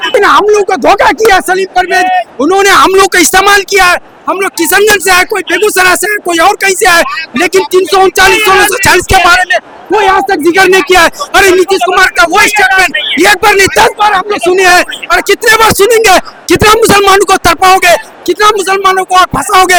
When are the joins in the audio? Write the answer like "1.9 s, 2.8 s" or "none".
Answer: none